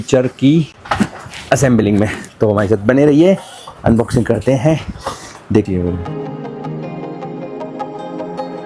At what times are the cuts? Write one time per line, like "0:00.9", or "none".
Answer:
none